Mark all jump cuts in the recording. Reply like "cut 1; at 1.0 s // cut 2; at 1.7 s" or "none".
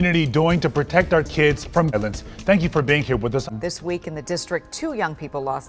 cut 1; at 2.0 s // cut 2; at 3.4 s